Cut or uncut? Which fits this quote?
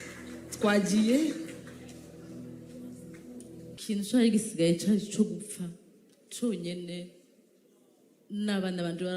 cut